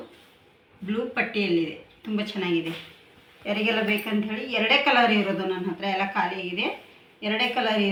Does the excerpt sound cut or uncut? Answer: uncut